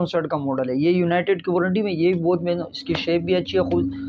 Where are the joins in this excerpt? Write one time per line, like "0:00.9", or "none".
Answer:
none